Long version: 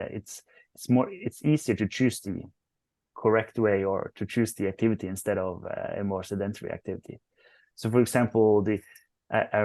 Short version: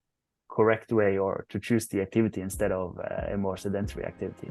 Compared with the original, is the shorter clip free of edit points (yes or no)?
yes